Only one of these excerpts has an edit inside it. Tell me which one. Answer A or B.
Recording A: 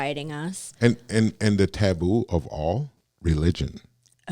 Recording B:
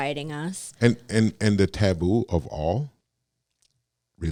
A